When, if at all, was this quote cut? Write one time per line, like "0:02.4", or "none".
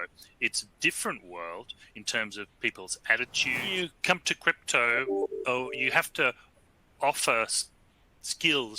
0:03.7